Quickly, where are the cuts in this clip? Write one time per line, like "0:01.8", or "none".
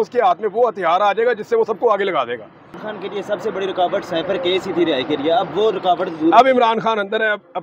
0:02.8

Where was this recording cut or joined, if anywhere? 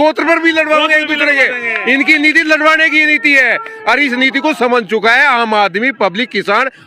none

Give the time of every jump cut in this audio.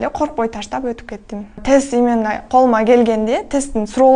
0:01.5

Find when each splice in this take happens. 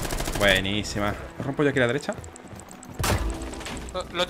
0:01.3

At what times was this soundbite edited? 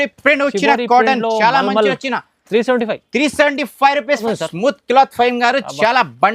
0:04.2

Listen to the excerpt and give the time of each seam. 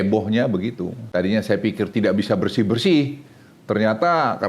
0:00.9

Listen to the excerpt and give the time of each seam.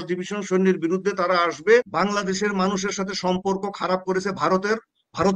0:01.9

